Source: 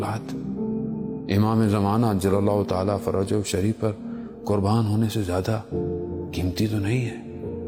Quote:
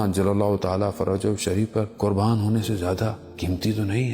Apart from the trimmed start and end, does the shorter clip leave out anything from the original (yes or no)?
yes